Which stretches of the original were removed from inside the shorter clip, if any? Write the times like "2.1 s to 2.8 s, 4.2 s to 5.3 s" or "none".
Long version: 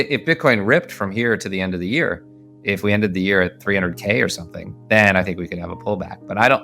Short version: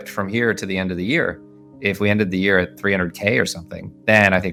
none